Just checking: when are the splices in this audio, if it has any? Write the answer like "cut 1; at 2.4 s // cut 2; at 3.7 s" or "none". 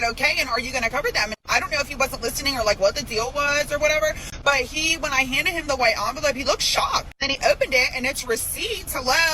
cut 1; at 1.4 s // cut 2; at 4.3 s // cut 3; at 7.2 s